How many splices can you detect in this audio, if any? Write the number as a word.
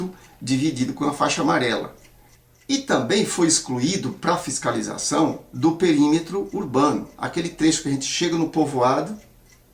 one